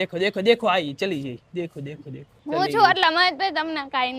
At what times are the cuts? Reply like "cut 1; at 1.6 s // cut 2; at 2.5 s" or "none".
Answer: cut 1; at 2.3 s

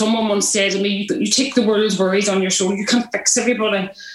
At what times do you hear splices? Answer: cut 1; at 1.0 s

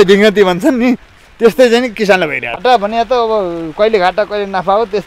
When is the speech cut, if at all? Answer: cut 1; at 2.5 s

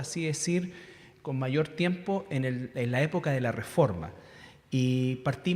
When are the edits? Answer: cut 1; at 2.6 s

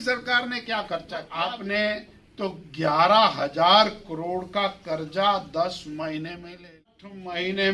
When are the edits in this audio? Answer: cut 1; at 1.3 s // cut 2; at 6.9 s

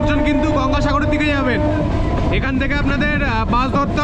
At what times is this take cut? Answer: none

